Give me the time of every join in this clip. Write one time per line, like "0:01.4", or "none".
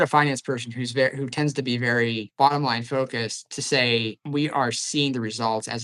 0:02.3
0:04.2